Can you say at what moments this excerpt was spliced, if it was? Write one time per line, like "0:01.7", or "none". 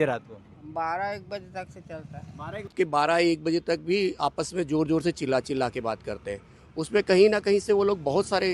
0:02.7